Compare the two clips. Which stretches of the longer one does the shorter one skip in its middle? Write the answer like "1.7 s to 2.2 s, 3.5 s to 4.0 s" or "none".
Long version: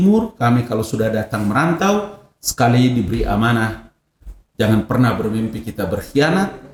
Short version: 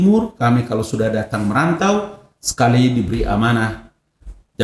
none

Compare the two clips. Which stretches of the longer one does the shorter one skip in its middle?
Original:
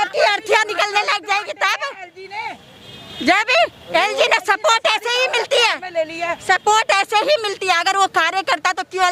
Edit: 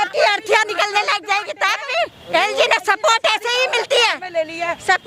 1.9 s to 3.5 s

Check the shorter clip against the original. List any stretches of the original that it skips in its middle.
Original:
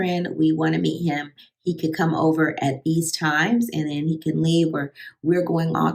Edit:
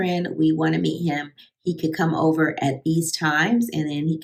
none

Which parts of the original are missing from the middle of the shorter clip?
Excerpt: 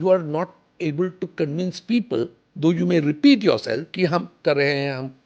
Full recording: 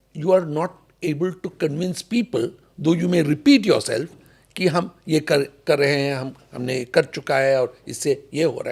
4.5 s to 5.5 s

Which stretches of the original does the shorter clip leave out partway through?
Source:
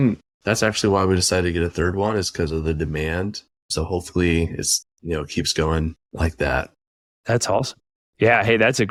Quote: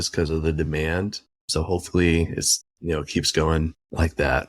none

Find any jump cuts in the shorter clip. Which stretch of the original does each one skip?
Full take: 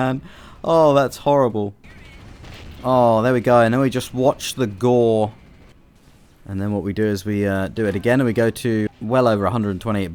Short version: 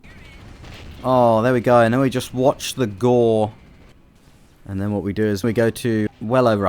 7.2 s to 8.2 s

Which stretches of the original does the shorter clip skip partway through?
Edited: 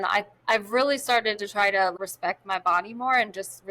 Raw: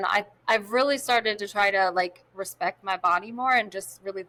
1.9 s to 2.3 s

